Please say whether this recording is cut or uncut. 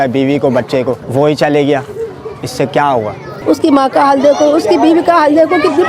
cut